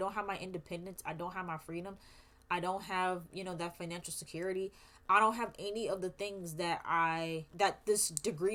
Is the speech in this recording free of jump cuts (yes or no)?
yes